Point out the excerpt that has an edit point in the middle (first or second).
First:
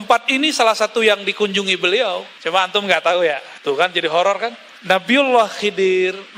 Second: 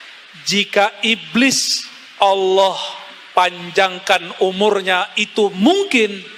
first